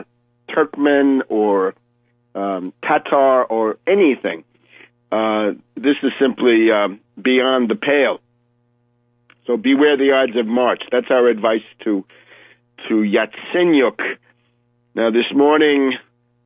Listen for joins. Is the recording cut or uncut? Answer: uncut